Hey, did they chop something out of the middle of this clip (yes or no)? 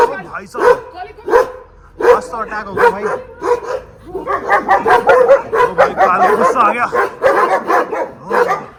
no